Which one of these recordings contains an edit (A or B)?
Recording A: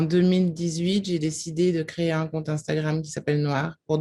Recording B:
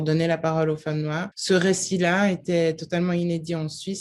B